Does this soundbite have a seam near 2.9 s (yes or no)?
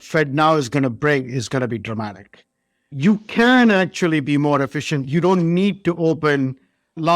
yes